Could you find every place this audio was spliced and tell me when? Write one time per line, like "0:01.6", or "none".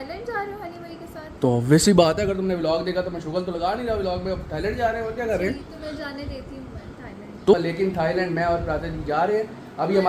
0:01.4
0:07.5